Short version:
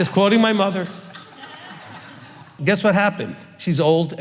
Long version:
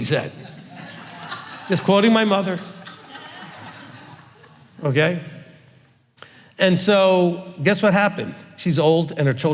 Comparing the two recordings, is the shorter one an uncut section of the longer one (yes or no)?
no